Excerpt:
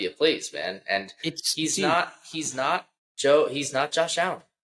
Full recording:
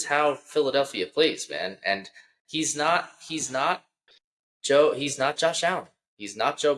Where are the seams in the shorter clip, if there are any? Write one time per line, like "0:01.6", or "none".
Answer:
0:03.0